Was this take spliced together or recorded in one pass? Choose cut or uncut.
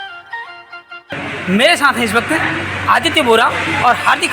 cut